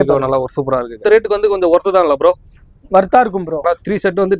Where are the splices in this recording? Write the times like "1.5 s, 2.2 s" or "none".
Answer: 0.9 s, 3.6 s